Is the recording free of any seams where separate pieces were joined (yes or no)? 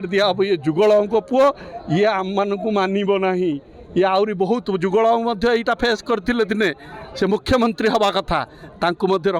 yes